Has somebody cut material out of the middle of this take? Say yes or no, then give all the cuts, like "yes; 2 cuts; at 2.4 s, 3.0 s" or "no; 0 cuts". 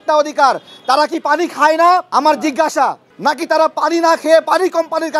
yes; 2 cuts; at 2.1 s, 3.1 s